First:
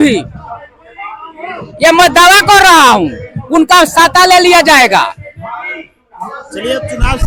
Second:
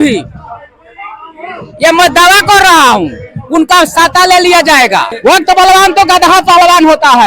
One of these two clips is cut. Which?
second; 1 cut; at 5.1 s

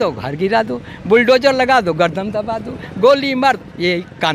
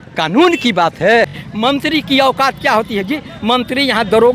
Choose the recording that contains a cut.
second; 1 cut; at 1.4 s

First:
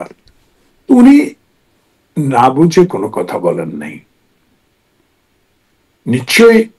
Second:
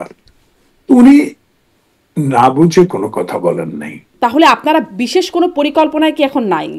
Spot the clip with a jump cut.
second; 1 cut; at 4.1 s

